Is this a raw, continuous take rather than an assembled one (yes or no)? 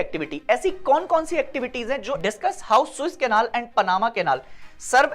no